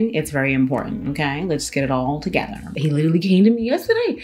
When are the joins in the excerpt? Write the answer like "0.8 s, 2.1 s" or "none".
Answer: 2.7 s